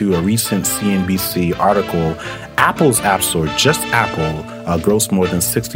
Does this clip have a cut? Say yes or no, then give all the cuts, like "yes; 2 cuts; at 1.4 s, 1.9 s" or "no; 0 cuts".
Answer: no; 0 cuts